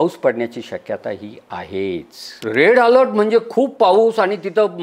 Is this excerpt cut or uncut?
cut